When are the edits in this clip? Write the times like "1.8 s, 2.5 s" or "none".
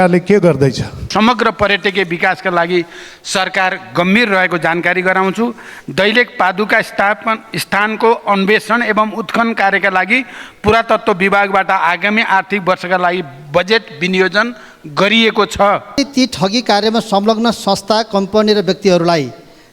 1.1 s, 15.9 s

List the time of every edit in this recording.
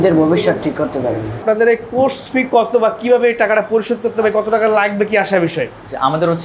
none

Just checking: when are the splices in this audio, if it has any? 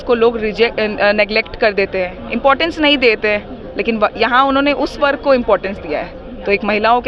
none

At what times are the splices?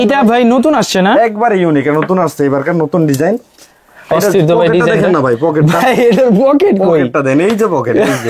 none

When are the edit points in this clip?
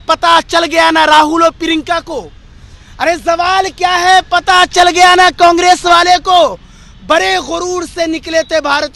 none

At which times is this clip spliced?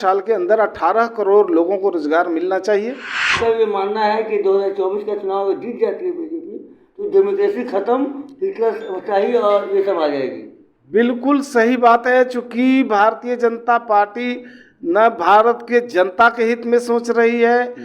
3.4 s

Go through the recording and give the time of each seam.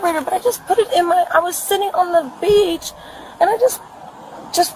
1.0 s

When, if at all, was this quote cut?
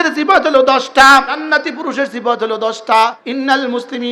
1.4 s, 3.2 s

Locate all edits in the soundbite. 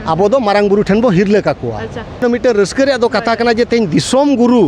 2.2 s

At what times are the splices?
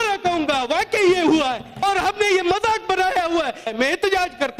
1.8 s, 3.7 s

